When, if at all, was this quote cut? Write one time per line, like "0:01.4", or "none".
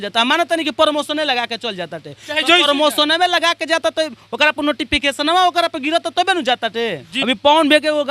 0:07.1